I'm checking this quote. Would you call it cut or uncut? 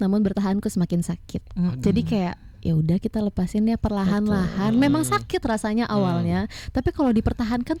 uncut